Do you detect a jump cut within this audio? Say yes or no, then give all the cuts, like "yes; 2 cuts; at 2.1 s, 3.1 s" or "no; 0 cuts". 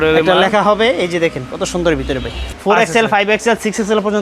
yes; 1 cut; at 2.4 s